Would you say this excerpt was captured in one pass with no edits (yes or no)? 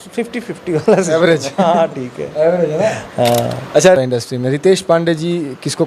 no